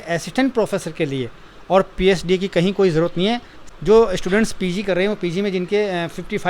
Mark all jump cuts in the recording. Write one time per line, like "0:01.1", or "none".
0:03.6